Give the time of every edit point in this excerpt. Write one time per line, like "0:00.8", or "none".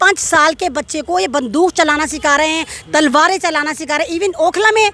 none